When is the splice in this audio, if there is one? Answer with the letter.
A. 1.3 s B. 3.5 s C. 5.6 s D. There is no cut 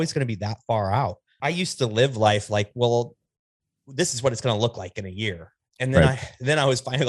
A